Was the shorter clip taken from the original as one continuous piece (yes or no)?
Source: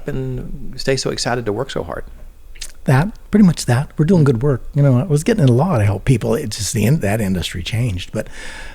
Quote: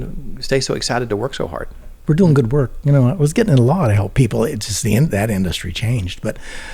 no